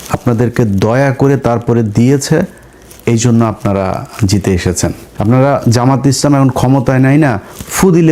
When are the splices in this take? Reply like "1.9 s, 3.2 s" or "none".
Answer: 5.1 s